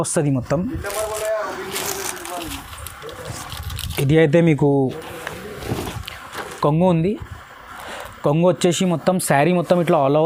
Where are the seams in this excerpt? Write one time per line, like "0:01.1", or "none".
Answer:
none